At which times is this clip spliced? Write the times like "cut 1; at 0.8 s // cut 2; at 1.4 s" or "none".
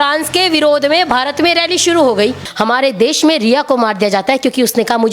cut 1; at 2.5 s